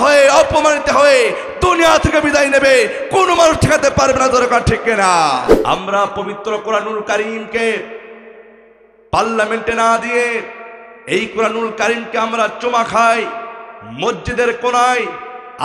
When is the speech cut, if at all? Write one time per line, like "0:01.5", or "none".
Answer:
0:05.5